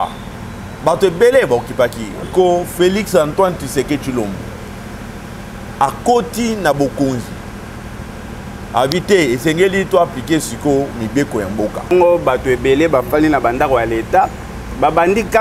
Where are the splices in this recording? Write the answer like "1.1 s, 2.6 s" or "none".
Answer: 2.3 s, 11.9 s